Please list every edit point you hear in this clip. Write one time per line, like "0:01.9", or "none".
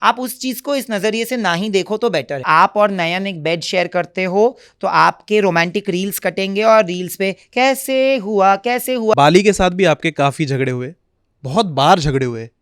0:02.4
0:09.1